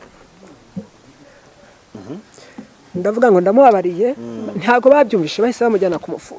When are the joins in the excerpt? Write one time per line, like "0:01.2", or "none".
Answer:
0:02.0